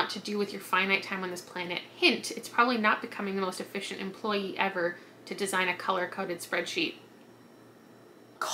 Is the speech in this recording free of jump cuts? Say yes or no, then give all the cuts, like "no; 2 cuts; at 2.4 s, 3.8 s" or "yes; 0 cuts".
yes; 0 cuts